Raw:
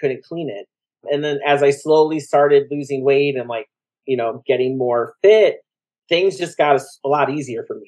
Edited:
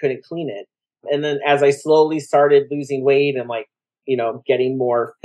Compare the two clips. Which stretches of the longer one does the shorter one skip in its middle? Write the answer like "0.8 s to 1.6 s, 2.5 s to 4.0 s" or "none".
none